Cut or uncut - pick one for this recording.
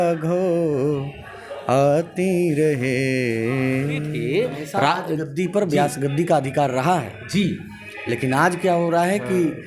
cut